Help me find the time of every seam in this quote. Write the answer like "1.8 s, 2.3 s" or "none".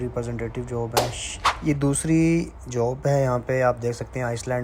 1.0 s